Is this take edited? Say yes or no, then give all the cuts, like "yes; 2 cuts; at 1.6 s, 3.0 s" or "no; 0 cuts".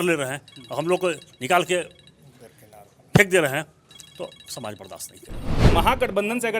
yes; 1 cut; at 5.5 s